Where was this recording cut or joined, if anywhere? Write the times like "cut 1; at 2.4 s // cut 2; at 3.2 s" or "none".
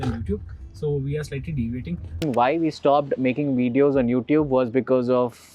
cut 1; at 2.2 s